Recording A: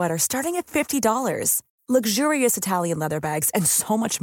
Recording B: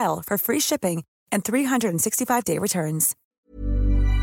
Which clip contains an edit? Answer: B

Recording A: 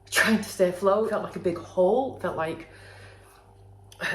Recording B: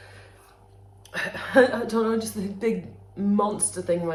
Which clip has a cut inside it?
A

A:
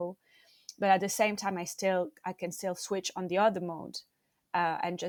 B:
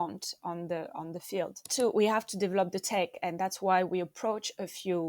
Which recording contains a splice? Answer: B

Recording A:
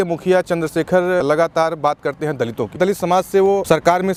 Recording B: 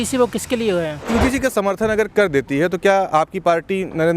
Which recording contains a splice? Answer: B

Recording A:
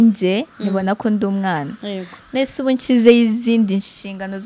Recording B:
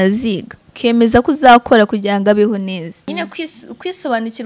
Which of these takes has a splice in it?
B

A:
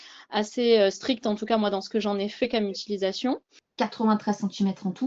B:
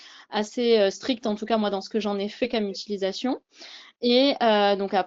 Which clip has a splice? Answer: A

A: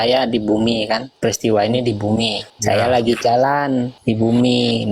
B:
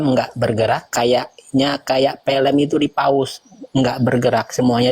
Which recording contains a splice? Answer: A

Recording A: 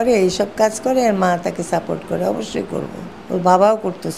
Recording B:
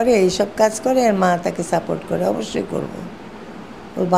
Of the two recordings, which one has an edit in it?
A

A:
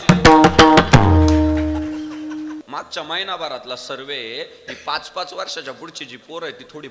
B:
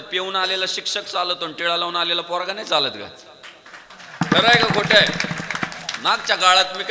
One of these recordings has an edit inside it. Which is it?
A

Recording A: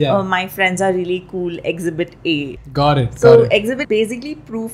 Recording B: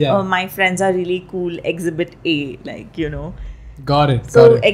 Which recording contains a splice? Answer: A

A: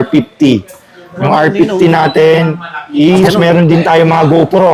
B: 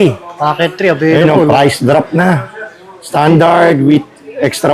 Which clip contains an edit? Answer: A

